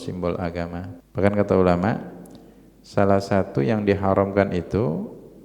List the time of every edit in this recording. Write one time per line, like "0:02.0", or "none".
0:01.0